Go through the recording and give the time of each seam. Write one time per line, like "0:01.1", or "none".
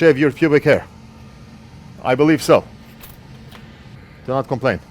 0:03.9